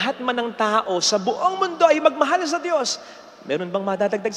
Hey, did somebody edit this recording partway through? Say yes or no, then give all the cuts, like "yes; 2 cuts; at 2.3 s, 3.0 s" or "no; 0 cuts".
no; 0 cuts